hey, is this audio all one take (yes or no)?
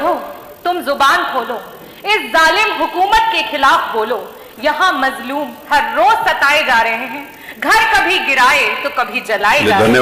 yes